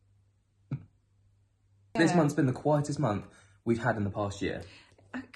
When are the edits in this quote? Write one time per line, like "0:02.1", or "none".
0:01.9